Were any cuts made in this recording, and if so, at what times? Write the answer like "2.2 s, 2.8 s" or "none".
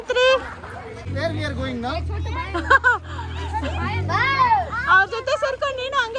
1.0 s